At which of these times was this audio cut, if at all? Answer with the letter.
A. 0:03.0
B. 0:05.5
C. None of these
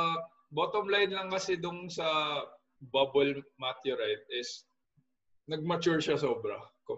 C